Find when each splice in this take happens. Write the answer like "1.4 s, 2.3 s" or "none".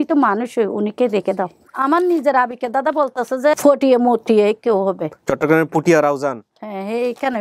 1.7 s, 3.5 s

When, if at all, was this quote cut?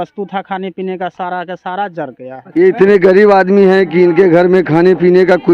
2.4 s

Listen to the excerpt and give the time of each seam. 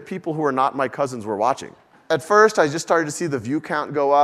1.9 s

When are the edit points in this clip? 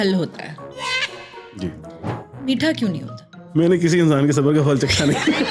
none

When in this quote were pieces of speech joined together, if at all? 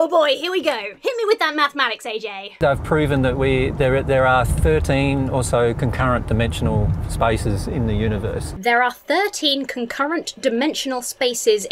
none

